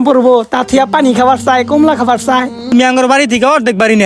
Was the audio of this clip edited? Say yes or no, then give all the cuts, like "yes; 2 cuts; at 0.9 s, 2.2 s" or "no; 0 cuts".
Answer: yes; 1 cut; at 2.7 s